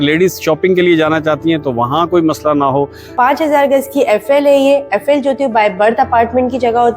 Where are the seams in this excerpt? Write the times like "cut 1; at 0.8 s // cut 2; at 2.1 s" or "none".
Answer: cut 1; at 3.0 s